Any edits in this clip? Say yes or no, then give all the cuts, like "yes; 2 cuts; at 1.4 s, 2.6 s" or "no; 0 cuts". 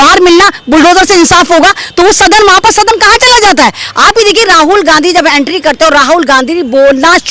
no; 0 cuts